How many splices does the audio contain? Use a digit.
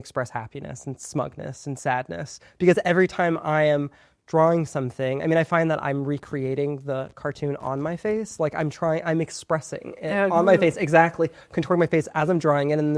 1